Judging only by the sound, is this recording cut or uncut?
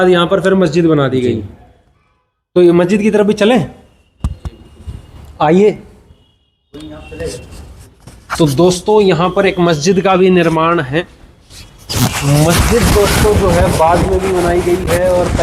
uncut